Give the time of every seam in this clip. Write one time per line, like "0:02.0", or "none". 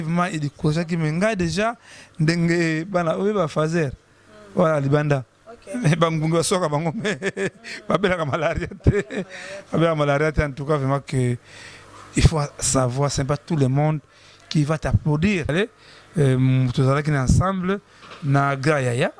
0:15.5